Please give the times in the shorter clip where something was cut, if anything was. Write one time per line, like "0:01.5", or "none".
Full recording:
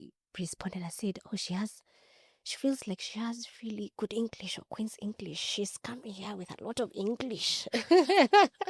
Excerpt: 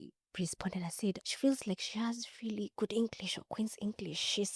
0:01.2